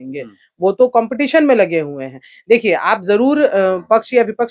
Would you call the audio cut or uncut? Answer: uncut